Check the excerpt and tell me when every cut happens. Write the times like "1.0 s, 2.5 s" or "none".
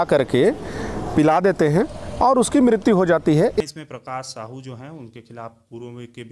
3.6 s